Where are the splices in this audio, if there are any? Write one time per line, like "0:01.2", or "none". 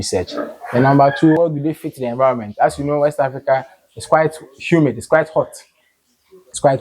0:01.4